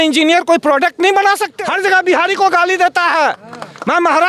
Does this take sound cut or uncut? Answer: cut